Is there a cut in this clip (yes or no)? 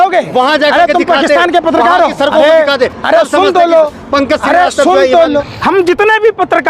yes